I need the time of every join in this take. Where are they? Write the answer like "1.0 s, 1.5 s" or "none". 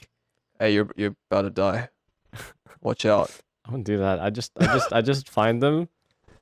none